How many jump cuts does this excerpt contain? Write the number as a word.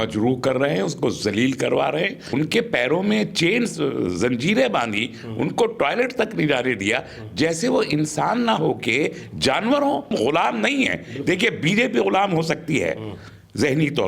two